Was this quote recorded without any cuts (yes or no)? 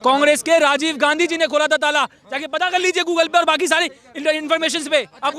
yes